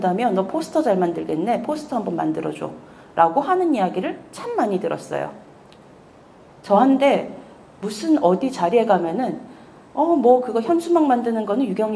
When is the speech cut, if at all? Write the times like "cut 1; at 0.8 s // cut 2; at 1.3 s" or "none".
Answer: none